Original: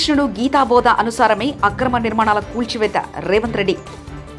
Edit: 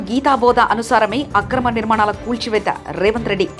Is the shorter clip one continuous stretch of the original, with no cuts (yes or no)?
yes